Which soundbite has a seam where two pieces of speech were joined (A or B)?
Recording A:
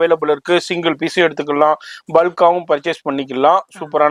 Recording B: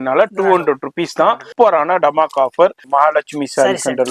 B